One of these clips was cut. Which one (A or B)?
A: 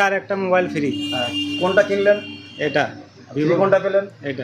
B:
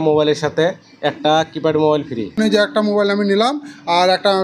B